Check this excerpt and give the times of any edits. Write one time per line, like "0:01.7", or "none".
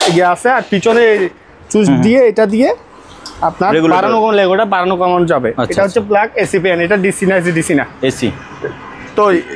none